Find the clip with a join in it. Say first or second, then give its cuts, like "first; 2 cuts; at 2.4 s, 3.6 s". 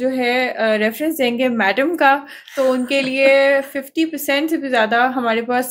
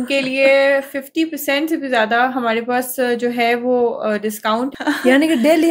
second; 1 cut; at 4.7 s